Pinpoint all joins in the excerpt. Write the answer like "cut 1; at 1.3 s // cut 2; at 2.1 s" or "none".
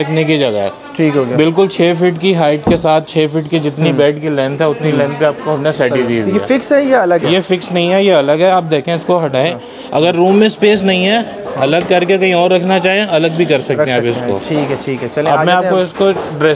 none